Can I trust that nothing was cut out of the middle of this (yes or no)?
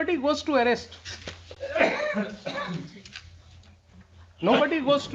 yes